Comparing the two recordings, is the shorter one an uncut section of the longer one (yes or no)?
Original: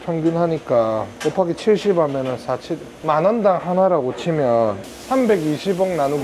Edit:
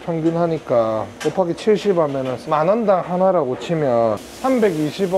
no